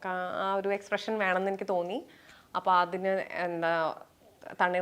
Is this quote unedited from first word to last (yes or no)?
yes